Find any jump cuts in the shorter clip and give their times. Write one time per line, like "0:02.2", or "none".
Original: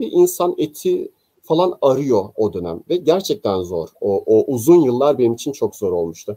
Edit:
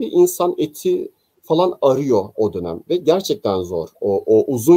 none